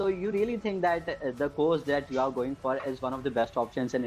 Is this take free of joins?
yes; 0 cuts

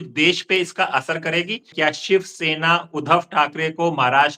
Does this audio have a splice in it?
yes; 1 cut; at 1.7 s

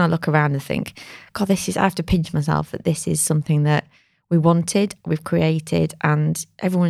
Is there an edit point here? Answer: no; 0 cuts

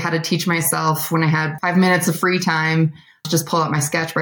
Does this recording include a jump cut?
yes; 1 cut; at 3.2 s

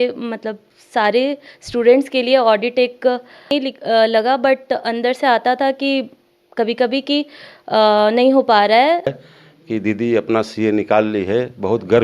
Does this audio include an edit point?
yes; 2 cuts; at 3.5 s, 9.1 s

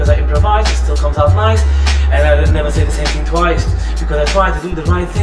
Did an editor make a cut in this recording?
no; 0 cuts

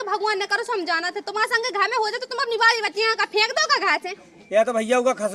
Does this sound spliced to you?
yes; 1 cut; at 4.1 s

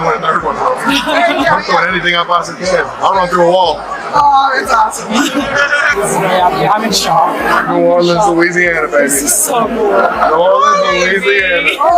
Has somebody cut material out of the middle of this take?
no; 0 cuts

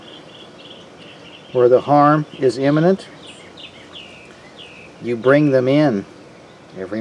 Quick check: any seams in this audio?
yes; 1 cut; at 4.5 s

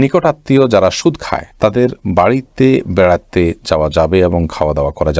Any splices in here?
no; 0 cuts

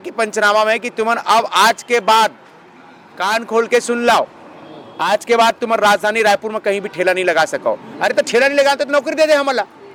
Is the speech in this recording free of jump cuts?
yes; 0 cuts

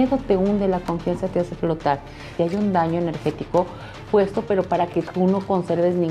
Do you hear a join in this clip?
yes; 1 cut; at 2.3 s

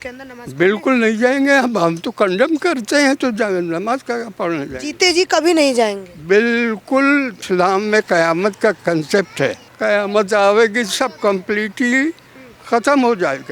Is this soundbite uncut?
no; 2 cuts; at 7.4 s, 9.7 s

